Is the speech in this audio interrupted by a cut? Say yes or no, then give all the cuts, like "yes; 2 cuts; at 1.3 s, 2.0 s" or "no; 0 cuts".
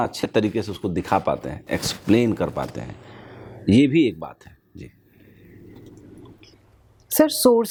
no; 0 cuts